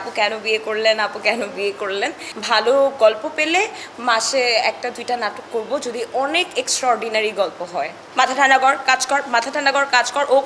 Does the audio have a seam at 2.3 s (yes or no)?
yes